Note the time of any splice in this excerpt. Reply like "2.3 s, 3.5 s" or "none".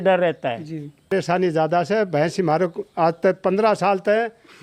1.1 s